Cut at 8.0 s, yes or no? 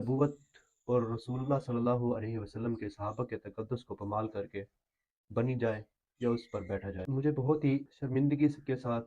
yes